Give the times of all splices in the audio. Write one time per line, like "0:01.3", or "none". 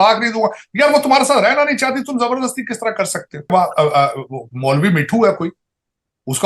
0:03.5